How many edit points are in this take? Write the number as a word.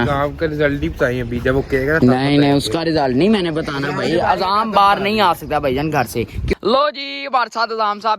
one